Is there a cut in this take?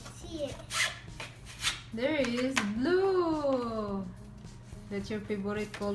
no; 0 cuts

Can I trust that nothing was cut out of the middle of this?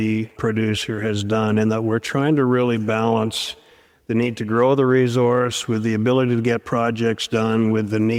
yes; 0 cuts

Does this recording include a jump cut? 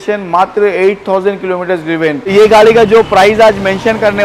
yes; 1 cut; at 2.2 s

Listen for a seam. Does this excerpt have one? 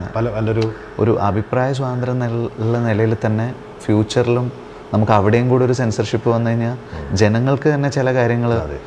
no; 0 cuts

